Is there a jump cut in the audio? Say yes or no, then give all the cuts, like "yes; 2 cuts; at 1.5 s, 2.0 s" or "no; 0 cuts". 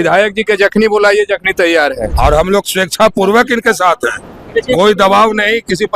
yes; 1 cut; at 2.1 s